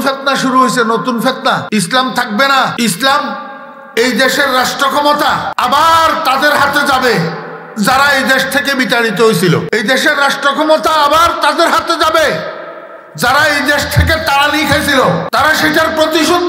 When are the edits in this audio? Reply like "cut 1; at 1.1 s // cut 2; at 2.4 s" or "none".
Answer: cut 1; at 1.6 s // cut 2; at 2.7 s // cut 3; at 5.5 s // cut 4; at 9.7 s // cut 5; at 15.3 s